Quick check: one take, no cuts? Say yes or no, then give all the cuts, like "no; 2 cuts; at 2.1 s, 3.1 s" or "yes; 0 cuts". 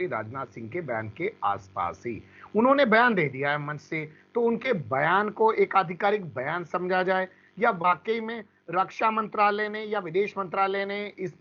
yes; 0 cuts